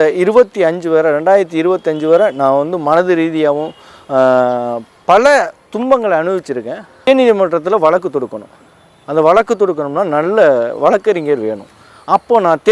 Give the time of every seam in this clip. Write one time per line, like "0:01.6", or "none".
0:07.0